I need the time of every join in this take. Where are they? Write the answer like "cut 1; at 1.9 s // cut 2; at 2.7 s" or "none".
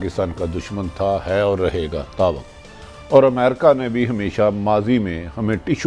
none